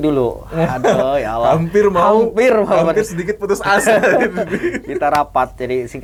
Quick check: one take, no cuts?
yes; 0 cuts

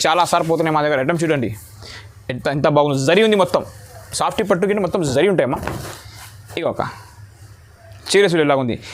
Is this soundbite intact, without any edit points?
yes; 0 cuts

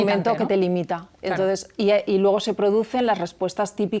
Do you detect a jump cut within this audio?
no; 0 cuts

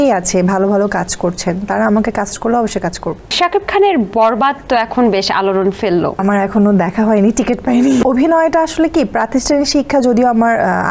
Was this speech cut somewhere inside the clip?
yes; 3 cuts; at 3.3 s, 6.2 s, 8.0 s

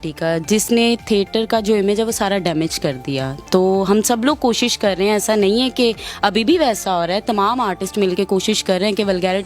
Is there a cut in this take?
no; 0 cuts

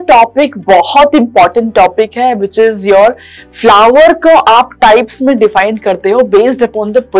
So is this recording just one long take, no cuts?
yes; 0 cuts

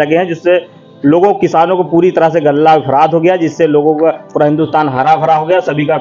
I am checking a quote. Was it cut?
no; 0 cuts

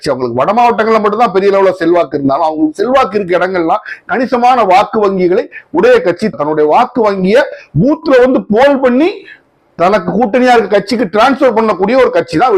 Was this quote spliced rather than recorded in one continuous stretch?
no; 0 cuts

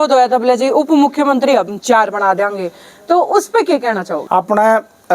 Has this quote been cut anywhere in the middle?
yes; 1 cut; at 4.2 s

